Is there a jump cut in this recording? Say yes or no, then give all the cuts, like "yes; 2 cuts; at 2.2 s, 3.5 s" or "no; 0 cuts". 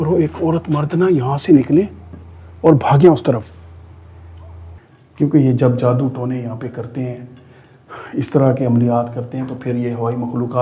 yes; 1 cut; at 4.8 s